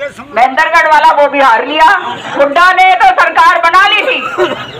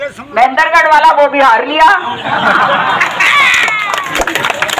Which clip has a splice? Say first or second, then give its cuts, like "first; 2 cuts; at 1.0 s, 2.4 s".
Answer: first; 1 cut; at 2.2 s